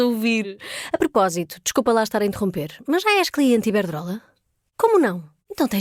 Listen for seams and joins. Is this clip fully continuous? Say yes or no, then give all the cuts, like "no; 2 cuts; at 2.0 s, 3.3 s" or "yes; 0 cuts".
yes; 0 cuts